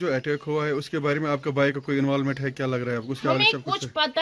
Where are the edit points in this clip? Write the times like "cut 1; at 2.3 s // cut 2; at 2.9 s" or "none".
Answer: none